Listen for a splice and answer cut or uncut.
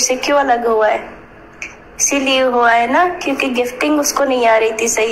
uncut